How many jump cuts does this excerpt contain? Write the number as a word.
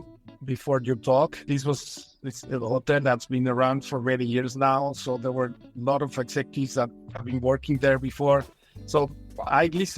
one